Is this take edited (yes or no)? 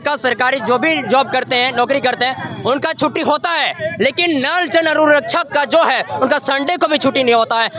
no